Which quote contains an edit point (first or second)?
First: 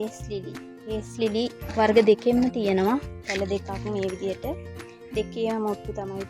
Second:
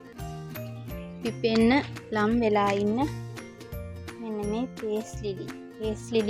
second